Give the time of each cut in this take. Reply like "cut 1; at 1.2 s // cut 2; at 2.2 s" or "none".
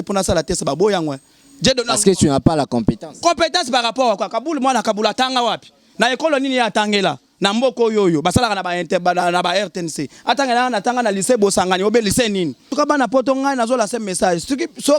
cut 1; at 12.7 s